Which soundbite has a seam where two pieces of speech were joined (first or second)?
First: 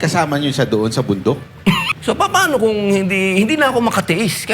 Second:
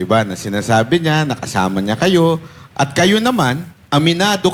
first